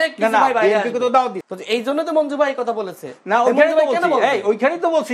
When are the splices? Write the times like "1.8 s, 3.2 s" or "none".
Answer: 1.4 s